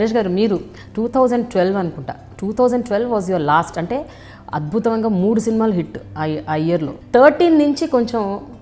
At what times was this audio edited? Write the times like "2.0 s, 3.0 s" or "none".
7.0 s